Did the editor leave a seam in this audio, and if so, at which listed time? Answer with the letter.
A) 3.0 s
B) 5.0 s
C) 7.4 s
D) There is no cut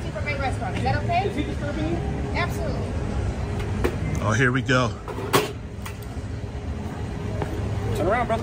D